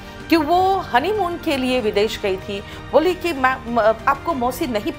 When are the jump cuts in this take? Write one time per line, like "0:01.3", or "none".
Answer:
none